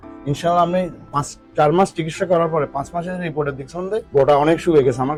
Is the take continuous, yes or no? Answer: yes